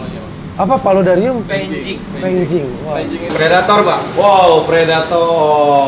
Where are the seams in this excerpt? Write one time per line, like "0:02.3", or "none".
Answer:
0:03.3